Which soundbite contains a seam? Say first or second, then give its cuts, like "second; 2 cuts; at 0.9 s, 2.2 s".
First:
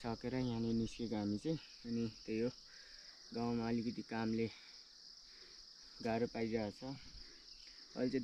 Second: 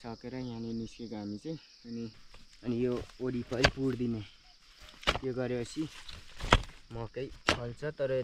second; 1 cut; at 2.2 s